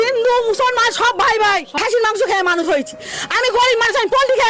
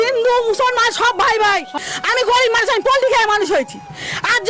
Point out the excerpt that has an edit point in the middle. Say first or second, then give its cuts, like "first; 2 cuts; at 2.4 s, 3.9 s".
second; 1 cut; at 1.7 s